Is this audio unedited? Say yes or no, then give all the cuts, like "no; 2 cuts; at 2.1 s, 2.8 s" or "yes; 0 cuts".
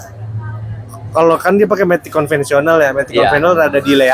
yes; 0 cuts